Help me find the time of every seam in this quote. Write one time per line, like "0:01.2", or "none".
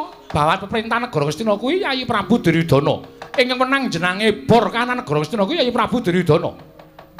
none